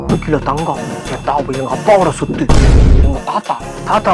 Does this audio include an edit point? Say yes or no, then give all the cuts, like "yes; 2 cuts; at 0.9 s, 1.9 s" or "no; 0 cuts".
no; 0 cuts